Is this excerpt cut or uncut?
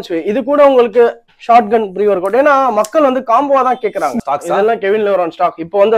cut